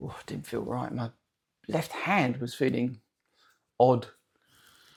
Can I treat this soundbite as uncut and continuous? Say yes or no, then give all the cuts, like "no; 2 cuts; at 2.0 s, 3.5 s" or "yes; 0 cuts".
yes; 0 cuts